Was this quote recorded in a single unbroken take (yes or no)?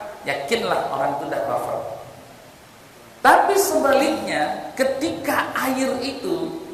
yes